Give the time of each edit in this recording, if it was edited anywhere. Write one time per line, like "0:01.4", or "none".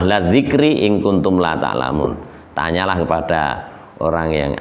none

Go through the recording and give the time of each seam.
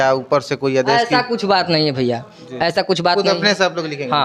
none

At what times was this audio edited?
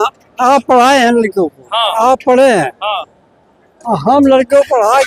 none

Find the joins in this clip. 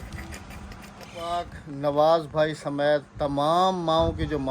0:01.3

